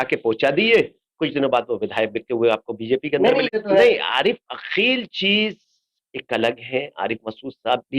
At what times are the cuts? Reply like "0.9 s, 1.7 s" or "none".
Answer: 3.5 s